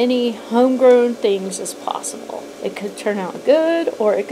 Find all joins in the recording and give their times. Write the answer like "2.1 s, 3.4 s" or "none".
2.5 s

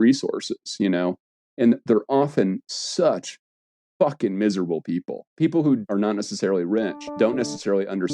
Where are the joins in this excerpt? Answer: 5.2 s, 5.8 s, 7.1 s

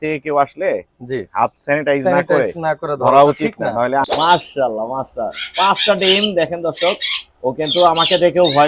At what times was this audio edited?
4.1 s

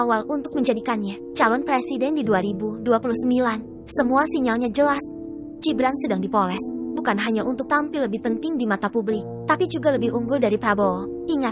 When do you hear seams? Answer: none

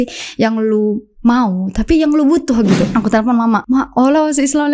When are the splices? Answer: 2.9 s, 3.6 s

